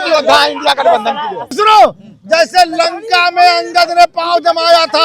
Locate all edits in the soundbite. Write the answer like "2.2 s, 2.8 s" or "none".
1.5 s

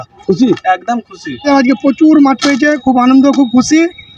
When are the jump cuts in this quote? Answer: 1.5 s

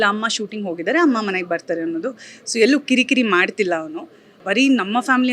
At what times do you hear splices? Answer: 4.4 s

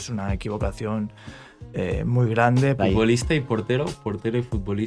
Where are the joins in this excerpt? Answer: 2.8 s

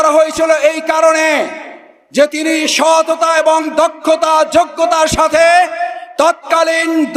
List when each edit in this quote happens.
none

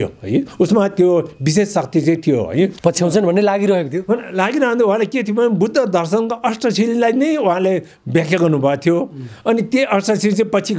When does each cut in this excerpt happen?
2.7 s

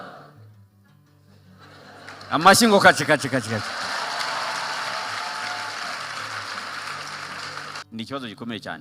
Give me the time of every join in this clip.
7.7 s

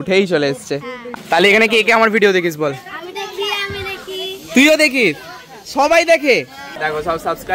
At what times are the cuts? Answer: 1.0 s, 6.7 s

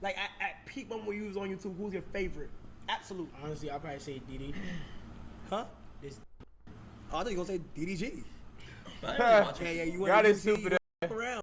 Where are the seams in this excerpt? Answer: 3.3 s

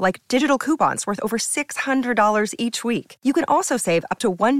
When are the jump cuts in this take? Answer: none

